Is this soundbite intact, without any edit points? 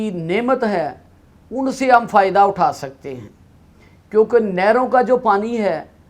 yes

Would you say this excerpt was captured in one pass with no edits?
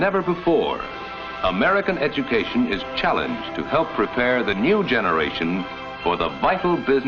no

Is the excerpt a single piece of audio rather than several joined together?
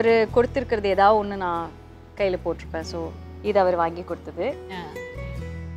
yes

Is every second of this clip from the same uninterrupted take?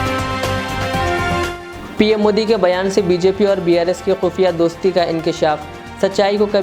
no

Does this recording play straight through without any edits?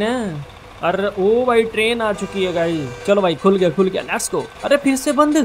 no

